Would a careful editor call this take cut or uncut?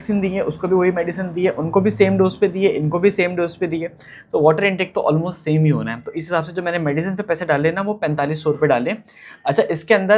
uncut